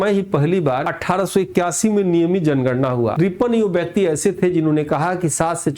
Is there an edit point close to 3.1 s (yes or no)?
yes